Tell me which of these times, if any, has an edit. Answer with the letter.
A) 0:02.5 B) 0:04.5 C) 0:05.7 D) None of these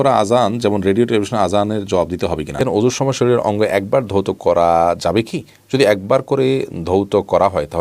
A